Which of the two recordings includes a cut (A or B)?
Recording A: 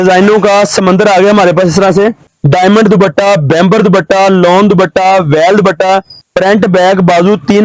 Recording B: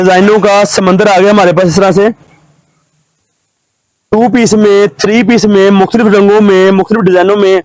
A